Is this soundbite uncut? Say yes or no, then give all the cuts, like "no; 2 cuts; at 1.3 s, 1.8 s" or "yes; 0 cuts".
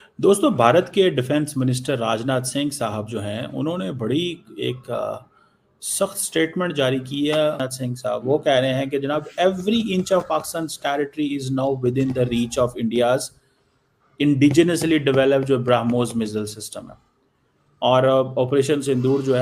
no; 1 cut; at 7.6 s